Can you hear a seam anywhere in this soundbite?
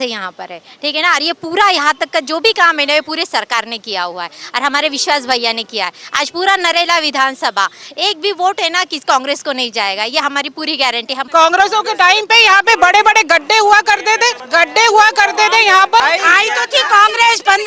yes; 3 cuts; at 11.2 s, 14.4 s, 16.0 s

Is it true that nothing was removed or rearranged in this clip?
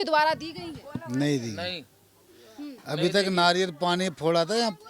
yes; 0 cuts

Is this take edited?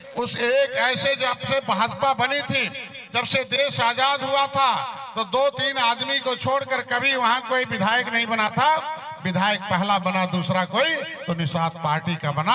no; 0 cuts

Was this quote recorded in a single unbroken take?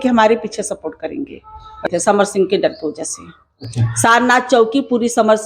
no; 1 cut; at 1.9 s

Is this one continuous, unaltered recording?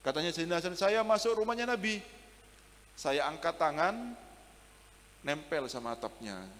yes; 0 cuts

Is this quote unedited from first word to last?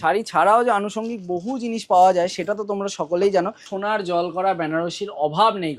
no; 1 cut; at 3.7 s

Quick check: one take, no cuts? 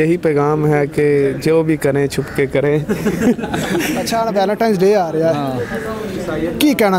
yes; 0 cuts

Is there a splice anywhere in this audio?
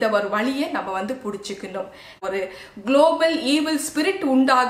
yes; 1 cut; at 2.2 s

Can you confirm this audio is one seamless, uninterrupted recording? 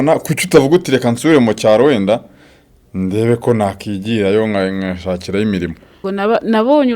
no; 1 cut; at 6.0 s

